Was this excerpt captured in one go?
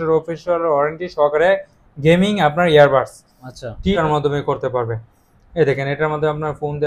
no; 1 cut; at 4.0 s

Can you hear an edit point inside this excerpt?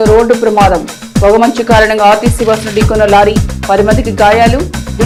no; 0 cuts

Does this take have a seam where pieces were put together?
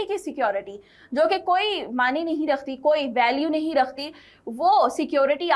no; 0 cuts

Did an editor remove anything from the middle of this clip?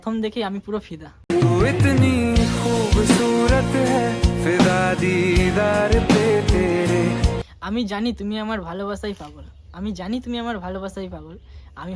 yes; 1 cut; at 7.5 s

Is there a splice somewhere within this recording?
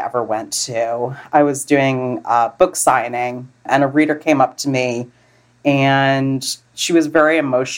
yes; 2 cuts; at 3.6 s, 6.5 s

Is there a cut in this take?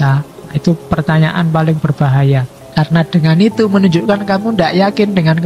yes; 1 cut; at 2.6 s

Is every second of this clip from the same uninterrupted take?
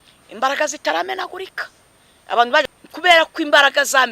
no; 1 cut; at 2.6 s

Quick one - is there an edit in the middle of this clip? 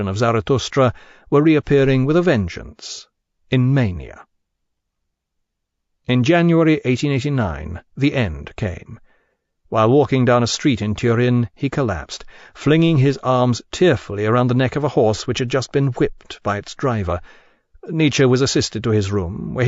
no; 0 cuts

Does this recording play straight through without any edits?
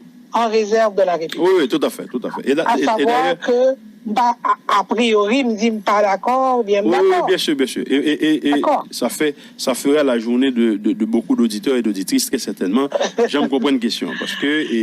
yes; 0 cuts

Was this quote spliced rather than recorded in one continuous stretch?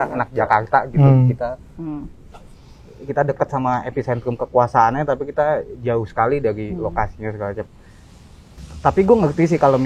no; 0 cuts

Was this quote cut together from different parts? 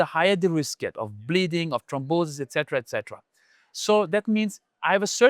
no; 0 cuts

